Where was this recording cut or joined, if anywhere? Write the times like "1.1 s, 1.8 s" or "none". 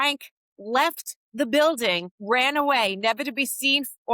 2.1 s